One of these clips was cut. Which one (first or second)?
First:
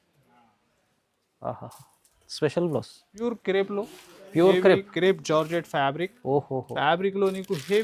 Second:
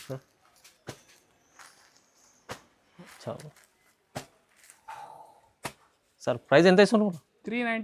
first